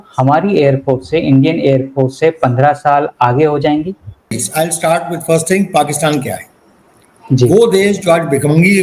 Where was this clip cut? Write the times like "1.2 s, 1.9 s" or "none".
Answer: 4.4 s